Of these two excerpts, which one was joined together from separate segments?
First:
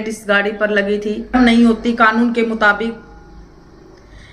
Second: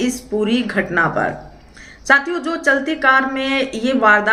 first; 1 cut; at 1.3 s

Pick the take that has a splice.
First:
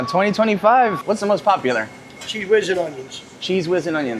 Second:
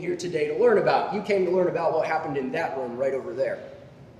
first; 1 cut; at 1.0 s

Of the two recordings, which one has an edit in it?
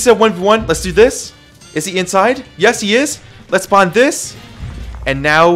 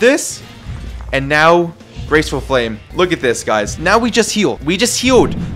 second; 2 cuts; at 2.8 s, 4.3 s

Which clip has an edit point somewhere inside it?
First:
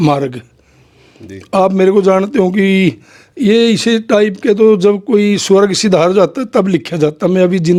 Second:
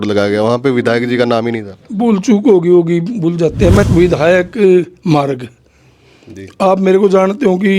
second; 1 cut; at 3.8 s

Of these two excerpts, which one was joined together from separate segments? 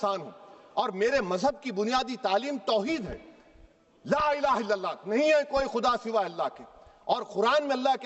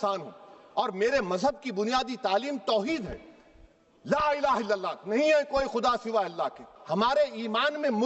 second; 1 cut; at 6.7 s

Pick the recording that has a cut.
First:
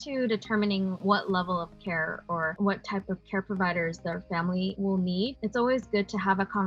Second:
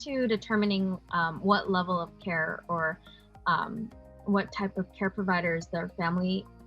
first; 3 cuts; at 1.0 s, 2.5 s, 5.0 s

